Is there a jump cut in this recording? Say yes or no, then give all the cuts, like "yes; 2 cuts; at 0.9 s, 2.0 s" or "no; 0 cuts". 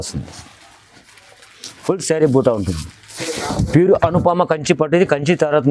yes; 1 cut; at 3.1 s